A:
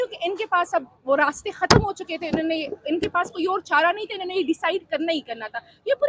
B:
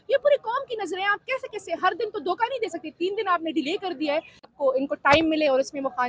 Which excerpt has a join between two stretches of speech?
B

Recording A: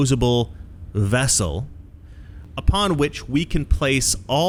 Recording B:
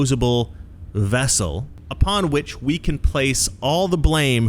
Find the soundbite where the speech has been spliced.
B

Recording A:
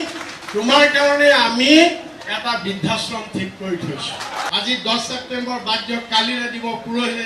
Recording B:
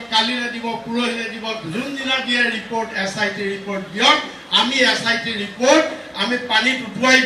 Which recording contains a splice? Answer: A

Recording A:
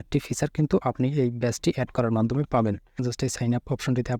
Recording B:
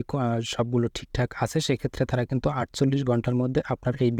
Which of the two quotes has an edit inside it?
A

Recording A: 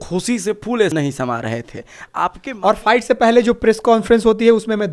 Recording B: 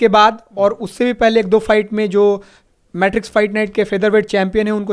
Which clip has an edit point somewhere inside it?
A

